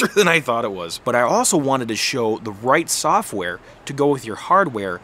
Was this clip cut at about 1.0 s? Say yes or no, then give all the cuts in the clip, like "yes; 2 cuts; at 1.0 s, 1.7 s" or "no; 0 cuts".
yes; 1 cut; at 1.0 s